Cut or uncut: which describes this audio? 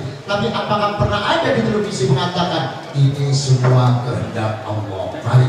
uncut